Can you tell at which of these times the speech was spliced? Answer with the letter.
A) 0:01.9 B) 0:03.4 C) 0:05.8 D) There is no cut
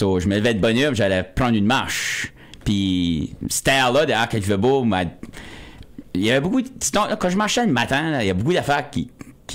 D